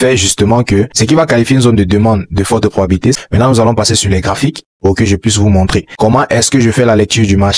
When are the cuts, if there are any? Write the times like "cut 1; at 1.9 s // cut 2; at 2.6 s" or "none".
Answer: cut 1; at 0.9 s // cut 2; at 3.2 s // cut 3; at 5.9 s

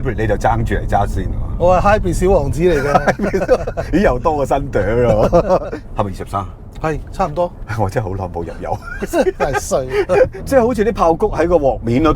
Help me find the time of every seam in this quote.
cut 1; at 5.7 s // cut 2; at 10.4 s

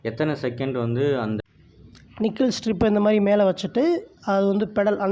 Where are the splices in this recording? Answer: cut 1; at 1.4 s

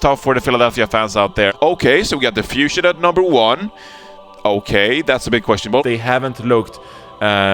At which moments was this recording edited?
none

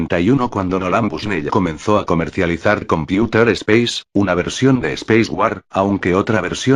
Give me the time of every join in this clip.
none

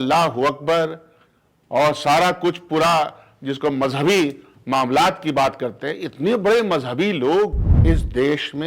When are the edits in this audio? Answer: cut 1; at 7.7 s

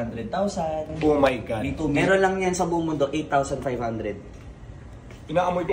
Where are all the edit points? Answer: cut 1; at 2.0 s

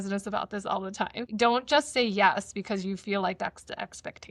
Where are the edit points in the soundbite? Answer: cut 1; at 1.2 s

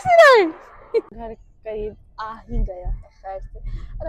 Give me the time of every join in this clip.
cut 1; at 1.1 s

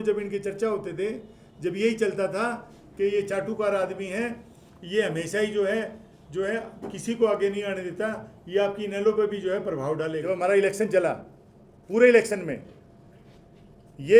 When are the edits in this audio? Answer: cut 1; at 10.2 s

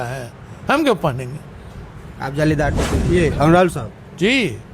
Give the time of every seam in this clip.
cut 1; at 2.8 s

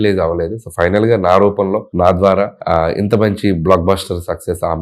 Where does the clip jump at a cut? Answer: cut 1; at 1.9 s // cut 2; at 2.6 s

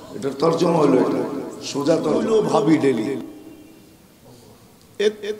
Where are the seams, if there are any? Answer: cut 1; at 2.2 s

